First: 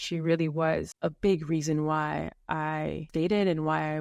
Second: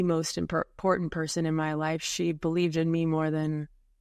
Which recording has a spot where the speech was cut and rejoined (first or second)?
first